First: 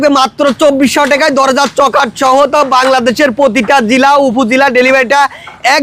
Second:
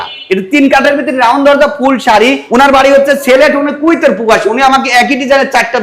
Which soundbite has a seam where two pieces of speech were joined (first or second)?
second